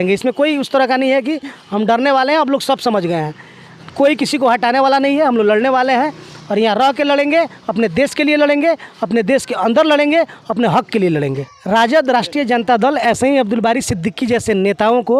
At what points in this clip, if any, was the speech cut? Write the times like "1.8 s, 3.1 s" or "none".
11.5 s